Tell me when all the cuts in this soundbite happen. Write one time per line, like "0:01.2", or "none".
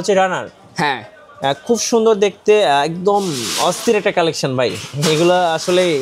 none